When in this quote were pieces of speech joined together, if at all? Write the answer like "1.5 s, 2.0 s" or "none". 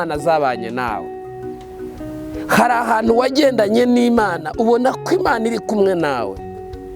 none